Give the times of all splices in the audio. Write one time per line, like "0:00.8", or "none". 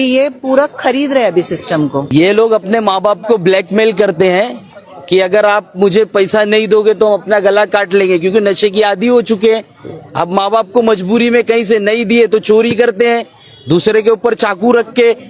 0:02.1